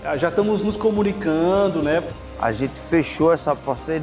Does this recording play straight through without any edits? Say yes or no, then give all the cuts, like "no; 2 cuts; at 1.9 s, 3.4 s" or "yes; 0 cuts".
no; 1 cut; at 2.2 s